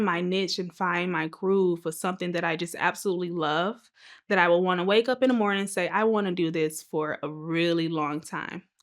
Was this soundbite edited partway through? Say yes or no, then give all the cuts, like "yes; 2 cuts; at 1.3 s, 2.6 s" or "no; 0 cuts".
no; 0 cuts